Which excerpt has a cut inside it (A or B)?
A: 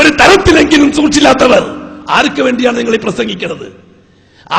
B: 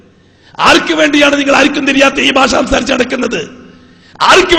A